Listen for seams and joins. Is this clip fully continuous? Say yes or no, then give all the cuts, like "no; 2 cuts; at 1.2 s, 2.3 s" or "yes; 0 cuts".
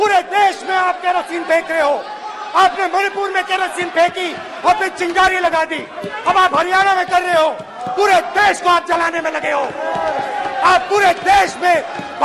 yes; 0 cuts